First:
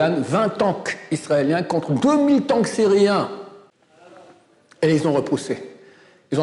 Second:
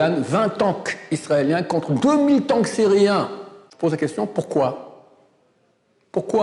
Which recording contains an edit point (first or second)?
second